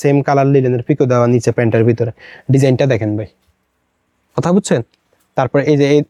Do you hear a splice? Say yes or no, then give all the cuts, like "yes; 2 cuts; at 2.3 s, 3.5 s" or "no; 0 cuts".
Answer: no; 0 cuts